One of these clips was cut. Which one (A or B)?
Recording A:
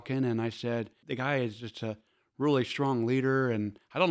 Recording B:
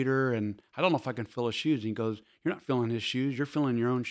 A